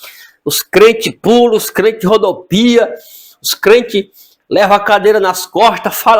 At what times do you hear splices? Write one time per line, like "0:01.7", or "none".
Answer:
none